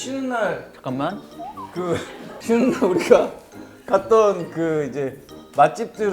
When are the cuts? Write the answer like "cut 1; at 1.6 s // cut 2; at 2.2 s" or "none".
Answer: cut 1; at 2.3 s